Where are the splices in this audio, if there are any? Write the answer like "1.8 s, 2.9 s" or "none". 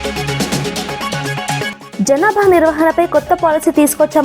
1.6 s